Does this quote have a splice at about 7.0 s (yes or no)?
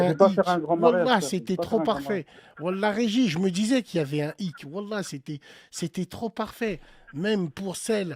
no